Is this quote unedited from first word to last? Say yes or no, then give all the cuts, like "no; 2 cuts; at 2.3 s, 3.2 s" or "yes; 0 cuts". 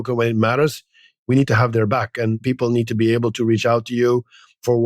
yes; 0 cuts